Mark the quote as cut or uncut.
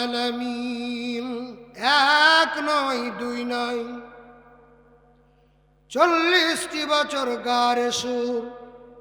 cut